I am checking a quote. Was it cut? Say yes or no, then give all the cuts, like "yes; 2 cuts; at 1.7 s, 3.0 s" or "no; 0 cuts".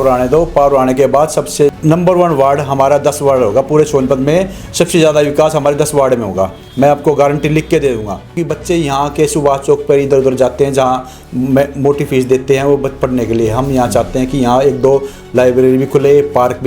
yes; 2 cuts; at 1.8 s, 8.3 s